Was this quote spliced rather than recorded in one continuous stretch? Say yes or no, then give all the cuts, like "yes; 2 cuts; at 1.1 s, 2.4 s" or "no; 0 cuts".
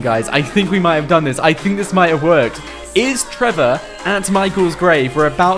no; 0 cuts